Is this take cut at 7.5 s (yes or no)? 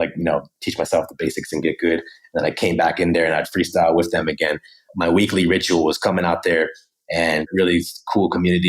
yes